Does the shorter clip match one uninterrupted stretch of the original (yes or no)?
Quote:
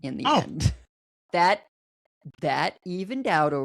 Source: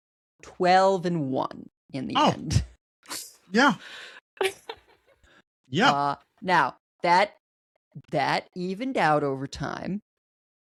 no